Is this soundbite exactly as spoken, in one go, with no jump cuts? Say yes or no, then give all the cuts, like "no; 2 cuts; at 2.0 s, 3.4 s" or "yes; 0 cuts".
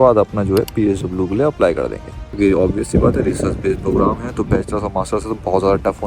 no; 1 cut; at 2.1 s